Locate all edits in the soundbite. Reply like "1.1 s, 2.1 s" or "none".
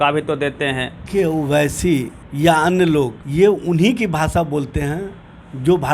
1.0 s, 2.2 s, 3.2 s